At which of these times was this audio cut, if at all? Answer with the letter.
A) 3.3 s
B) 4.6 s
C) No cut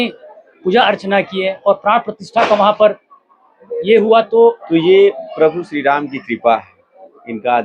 B